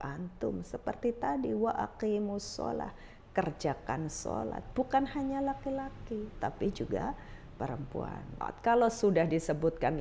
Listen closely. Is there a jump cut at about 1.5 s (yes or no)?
no